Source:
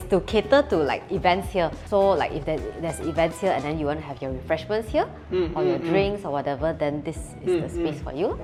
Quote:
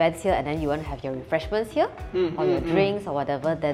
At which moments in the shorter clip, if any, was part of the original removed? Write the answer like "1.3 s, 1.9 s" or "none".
none